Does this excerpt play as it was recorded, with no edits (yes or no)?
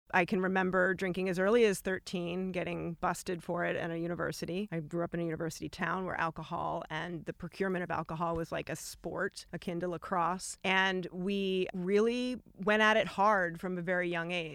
no